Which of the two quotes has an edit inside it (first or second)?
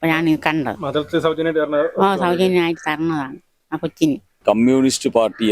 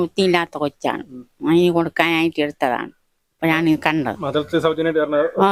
first